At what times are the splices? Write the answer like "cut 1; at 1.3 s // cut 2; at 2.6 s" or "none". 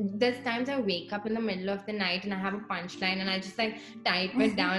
none